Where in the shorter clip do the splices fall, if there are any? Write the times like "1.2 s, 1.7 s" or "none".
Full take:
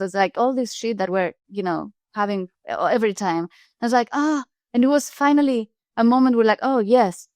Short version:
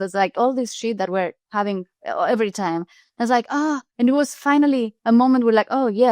1.4 s, 3.9 s, 4.9 s